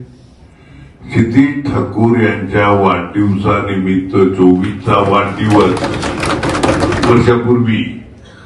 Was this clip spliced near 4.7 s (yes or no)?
no